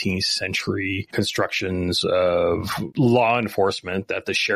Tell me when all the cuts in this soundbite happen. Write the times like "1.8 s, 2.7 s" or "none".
1.1 s, 2.8 s